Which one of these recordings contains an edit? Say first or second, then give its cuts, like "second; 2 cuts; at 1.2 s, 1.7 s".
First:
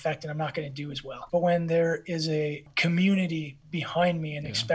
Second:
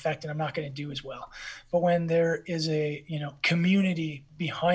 first; 2 cuts; at 1.1 s, 2.7 s